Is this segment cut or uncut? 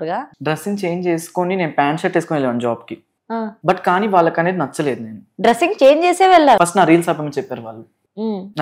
cut